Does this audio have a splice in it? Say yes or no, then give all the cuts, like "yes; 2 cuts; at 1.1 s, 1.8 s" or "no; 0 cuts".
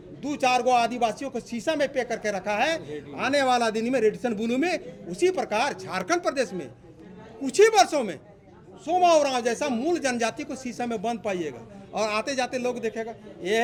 no; 0 cuts